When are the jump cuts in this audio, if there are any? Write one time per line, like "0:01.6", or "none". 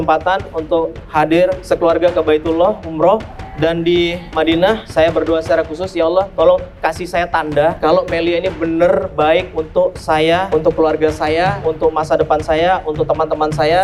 none